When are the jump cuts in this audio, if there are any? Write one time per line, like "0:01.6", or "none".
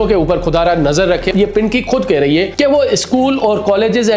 0:01.3
0:02.5